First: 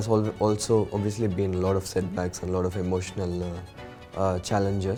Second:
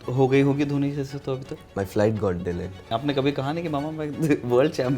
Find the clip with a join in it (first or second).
second